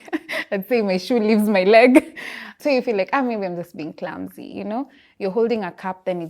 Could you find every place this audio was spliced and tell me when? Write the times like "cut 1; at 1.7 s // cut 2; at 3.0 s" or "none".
cut 1; at 2.5 s